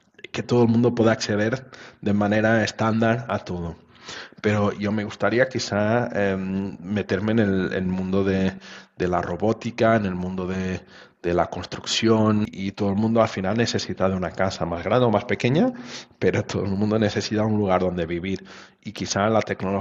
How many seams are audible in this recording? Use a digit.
1